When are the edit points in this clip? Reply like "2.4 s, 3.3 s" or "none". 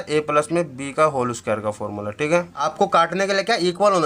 2.6 s

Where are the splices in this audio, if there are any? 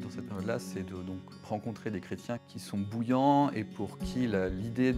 2.5 s

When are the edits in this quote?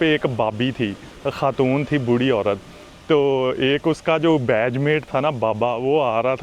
1.1 s

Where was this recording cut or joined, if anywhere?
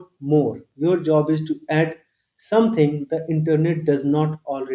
none

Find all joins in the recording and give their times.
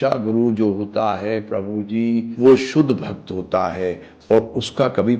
2.3 s

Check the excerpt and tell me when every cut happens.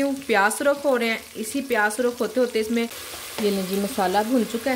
3.0 s

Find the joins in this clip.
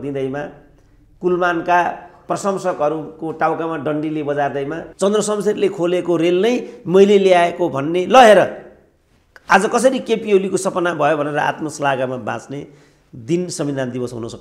2.2 s, 4.8 s

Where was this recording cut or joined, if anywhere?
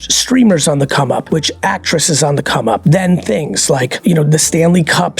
1.3 s, 2.8 s, 3.9 s

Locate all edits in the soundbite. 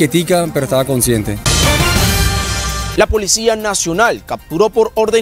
1.4 s, 2.8 s

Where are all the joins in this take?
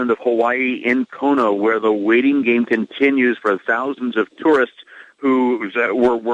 none

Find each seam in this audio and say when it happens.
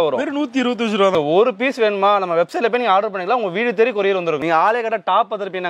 1.1 s, 4.4 s

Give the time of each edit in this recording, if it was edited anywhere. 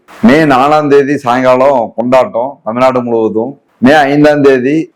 none

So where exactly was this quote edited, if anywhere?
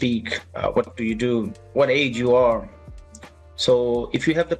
1.0 s

